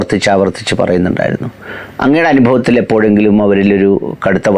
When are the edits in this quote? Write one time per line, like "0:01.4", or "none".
none